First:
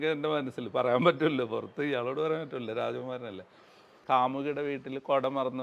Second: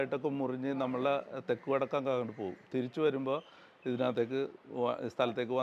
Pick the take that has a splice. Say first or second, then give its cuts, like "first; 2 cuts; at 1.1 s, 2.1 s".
first; 1 cut; at 4.0 s